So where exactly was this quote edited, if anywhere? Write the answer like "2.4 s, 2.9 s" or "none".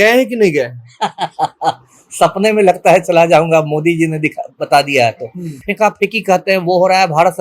5.6 s

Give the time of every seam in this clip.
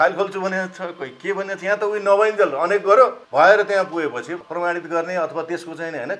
3.2 s, 4.4 s

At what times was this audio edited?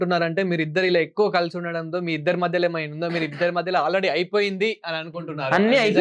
none

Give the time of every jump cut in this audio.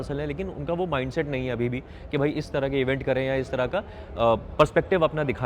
none

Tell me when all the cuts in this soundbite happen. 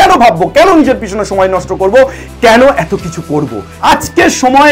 3.8 s

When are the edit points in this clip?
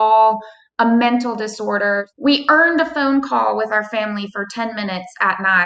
2.1 s

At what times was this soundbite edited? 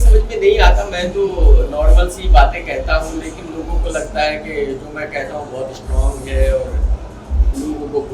none

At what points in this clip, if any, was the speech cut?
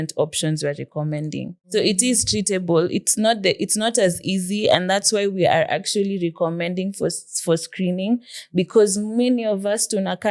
1.6 s

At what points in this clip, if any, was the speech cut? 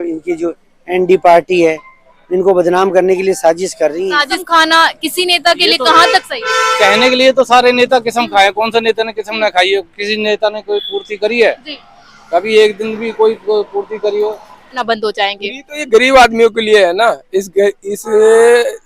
4.4 s, 14.8 s

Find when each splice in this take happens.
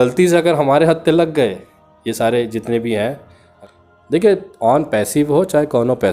3.5 s

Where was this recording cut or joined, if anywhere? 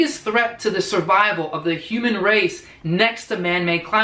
none

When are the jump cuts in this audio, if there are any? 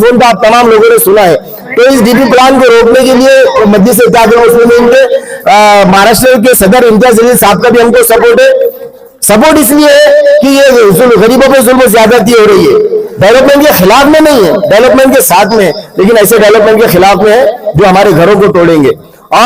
none

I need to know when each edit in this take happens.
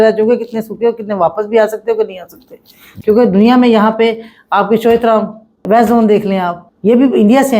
5.6 s, 6.7 s

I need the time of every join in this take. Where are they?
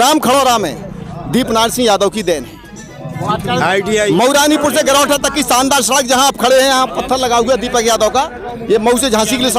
none

